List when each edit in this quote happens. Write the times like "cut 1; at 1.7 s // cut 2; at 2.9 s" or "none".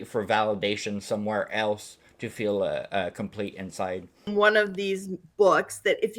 cut 1; at 4.3 s